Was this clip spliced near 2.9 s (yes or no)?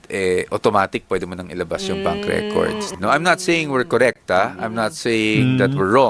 yes